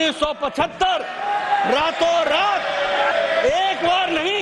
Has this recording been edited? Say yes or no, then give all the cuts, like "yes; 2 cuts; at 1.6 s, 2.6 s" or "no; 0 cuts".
yes; 1 cut; at 3.1 s